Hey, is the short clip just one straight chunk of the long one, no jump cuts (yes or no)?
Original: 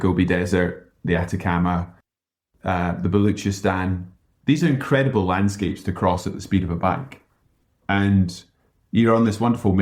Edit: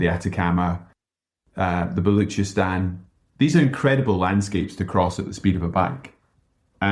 yes